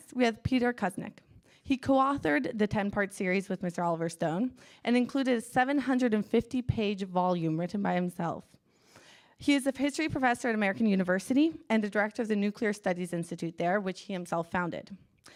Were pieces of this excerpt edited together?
no; 0 cuts

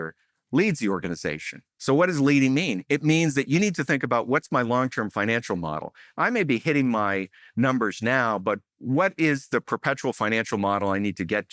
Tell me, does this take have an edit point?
no; 0 cuts

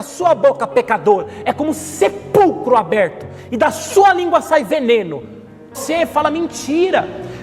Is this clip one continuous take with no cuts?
no; 1 cut; at 5.8 s

